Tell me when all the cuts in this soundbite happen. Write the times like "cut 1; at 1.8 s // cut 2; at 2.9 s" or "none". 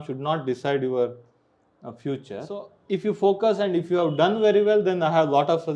cut 1; at 2.7 s